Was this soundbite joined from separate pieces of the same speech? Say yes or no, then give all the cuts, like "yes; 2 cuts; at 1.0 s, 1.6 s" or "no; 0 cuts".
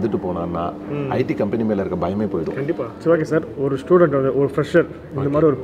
yes; 1 cut; at 2.9 s